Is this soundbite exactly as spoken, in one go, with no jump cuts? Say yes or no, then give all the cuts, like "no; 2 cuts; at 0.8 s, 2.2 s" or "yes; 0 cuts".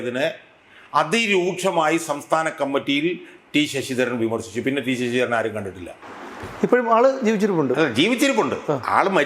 yes; 0 cuts